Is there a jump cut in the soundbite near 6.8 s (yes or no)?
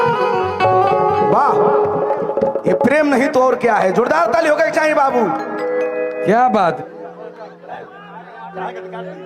yes